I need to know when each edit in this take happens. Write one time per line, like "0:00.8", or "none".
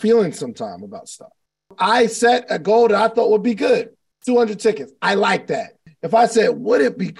0:01.7
0:05.8